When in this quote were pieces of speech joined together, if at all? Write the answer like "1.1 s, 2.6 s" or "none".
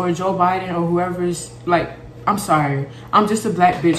none